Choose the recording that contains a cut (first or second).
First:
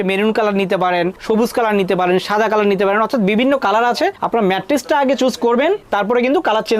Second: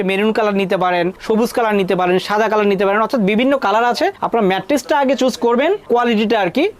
first